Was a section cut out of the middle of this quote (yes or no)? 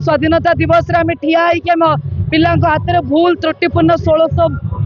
no